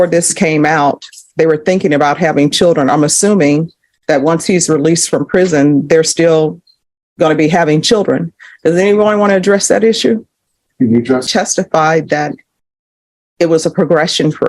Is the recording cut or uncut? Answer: cut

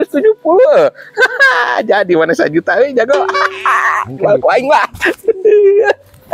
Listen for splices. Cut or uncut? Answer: uncut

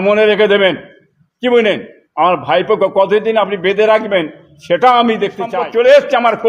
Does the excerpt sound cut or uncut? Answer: cut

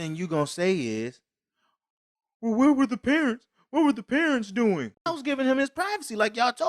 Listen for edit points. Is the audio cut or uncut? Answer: cut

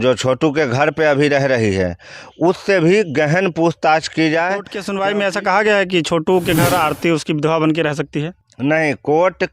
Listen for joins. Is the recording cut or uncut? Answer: cut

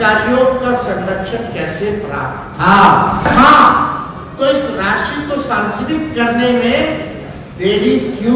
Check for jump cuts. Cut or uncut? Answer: cut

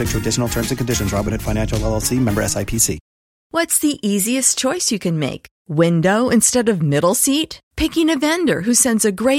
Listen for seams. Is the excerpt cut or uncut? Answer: cut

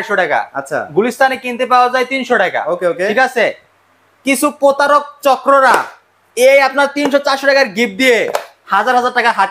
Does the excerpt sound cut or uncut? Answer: uncut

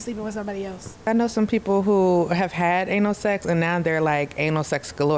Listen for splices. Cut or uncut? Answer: cut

